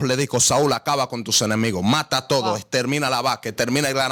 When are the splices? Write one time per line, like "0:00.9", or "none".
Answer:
none